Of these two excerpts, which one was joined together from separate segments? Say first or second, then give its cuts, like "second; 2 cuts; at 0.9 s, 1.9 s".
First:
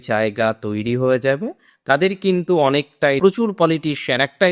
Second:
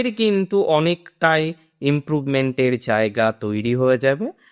first; 1 cut; at 3.2 s